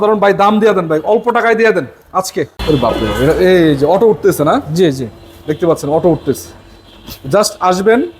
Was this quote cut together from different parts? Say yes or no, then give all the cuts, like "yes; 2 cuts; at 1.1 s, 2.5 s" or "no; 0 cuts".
yes; 1 cut; at 2.5 s